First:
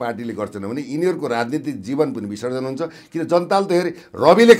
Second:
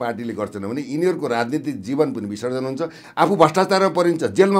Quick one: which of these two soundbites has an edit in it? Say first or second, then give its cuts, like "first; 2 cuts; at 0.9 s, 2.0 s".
second; 1 cut; at 3.0 s